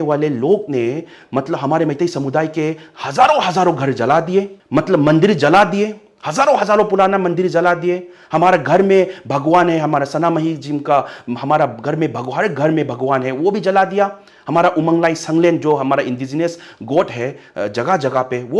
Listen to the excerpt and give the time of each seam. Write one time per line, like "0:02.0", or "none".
0:04.6